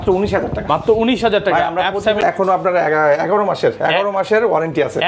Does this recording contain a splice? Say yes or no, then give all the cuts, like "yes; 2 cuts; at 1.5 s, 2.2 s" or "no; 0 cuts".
yes; 1 cut; at 2.2 s